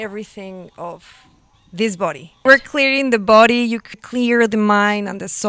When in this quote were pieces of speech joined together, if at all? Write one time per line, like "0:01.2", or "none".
0:02.4
0:03.9